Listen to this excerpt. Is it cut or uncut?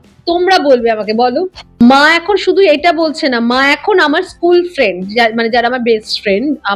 cut